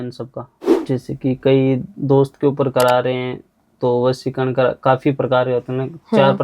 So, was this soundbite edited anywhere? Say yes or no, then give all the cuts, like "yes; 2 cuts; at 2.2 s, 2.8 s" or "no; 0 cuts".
yes; 1 cut; at 0.9 s